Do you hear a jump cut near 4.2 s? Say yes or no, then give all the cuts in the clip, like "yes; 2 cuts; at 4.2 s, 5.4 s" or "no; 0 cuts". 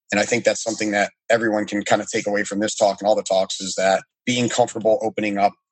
yes; 1 cut; at 4.2 s